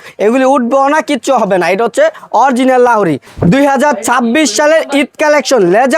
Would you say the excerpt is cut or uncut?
cut